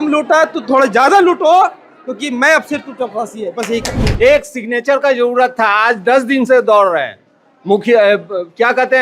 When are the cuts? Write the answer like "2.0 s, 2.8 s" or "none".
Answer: 4.0 s